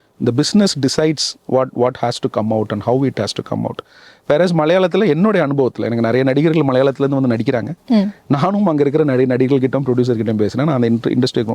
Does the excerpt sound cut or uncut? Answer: uncut